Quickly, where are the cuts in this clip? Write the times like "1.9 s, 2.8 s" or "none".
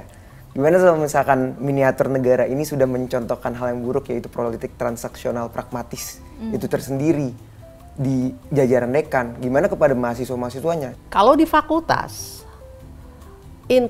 10.9 s